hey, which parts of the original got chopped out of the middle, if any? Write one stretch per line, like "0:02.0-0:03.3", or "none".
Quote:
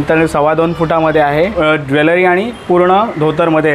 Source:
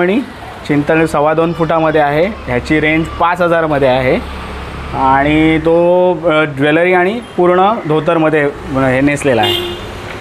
0:02.3-0:06.2